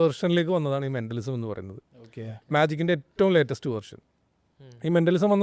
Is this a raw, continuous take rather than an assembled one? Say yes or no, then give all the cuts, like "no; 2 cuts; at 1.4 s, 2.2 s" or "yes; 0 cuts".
yes; 0 cuts